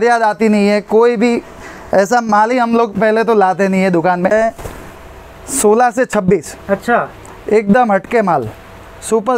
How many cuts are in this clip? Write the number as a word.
one